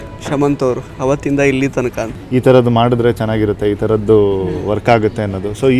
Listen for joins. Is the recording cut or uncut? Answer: cut